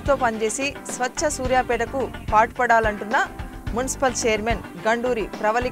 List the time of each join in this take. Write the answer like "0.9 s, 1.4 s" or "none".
none